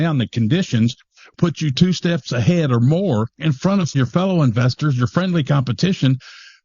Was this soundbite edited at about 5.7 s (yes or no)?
no